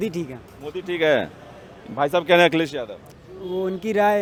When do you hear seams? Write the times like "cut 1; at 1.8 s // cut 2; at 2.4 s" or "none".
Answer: none

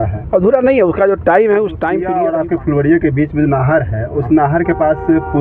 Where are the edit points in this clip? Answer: cut 1; at 2.0 s

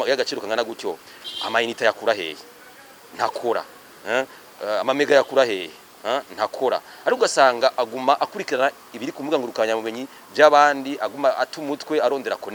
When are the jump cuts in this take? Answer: none

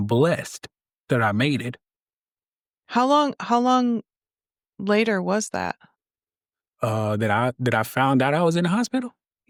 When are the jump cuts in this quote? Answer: none

